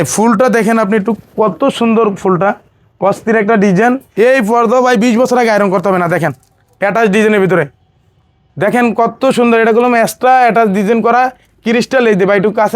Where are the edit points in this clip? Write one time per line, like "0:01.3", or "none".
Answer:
0:04.1